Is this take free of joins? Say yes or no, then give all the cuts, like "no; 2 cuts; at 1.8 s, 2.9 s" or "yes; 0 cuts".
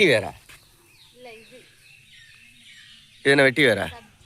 yes; 0 cuts